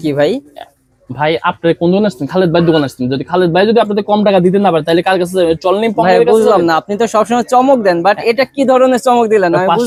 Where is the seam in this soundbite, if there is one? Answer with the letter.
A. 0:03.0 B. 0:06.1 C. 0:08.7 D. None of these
D